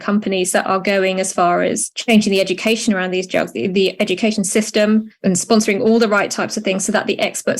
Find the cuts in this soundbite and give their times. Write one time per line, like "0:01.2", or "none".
0:01.9
0:05.1